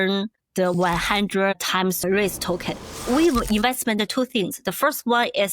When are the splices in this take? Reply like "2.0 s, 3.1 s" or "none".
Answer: 0.7 s, 2.0 s, 3.0 s, 4.1 s

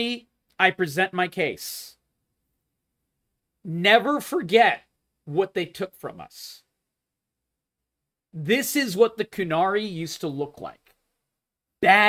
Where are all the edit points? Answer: none

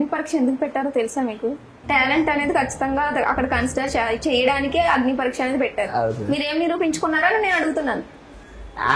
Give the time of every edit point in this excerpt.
1.7 s

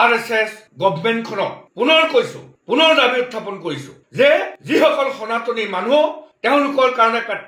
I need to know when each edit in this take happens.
none

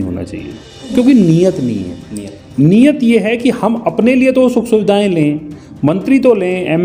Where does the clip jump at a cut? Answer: 0.9 s

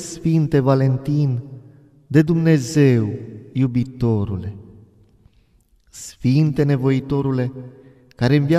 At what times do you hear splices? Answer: 5.4 s

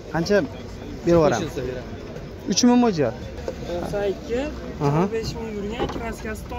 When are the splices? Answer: 3.3 s

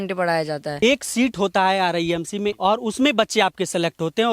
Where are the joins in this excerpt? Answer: 0.8 s, 2.5 s

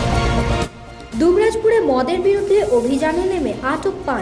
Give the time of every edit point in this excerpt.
1.0 s

